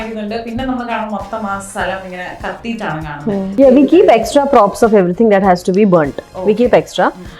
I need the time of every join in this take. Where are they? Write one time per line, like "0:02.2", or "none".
0:03.5